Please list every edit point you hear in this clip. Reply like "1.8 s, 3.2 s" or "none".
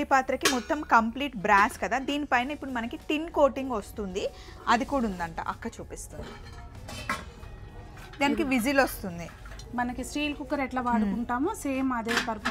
none